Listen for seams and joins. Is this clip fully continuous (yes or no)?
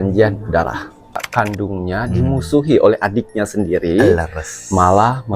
no